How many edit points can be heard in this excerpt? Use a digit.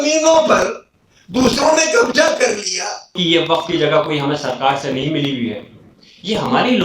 1